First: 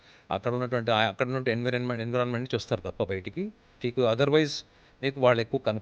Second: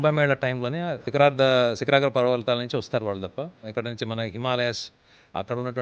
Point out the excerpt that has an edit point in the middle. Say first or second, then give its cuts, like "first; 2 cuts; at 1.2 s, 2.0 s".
second; 2 cuts; at 1.0 s, 3.6 s